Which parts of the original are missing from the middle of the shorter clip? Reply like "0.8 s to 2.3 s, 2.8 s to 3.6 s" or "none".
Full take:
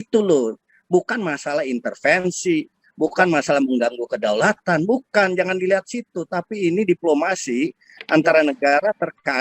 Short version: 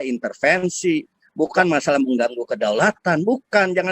none